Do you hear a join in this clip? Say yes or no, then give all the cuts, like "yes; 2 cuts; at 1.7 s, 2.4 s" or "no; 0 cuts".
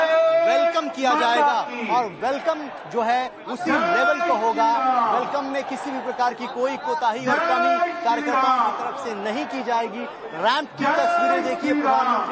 no; 0 cuts